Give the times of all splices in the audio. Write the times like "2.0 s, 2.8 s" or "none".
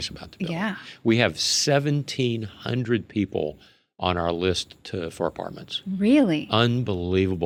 none